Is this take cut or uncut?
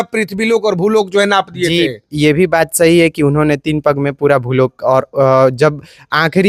uncut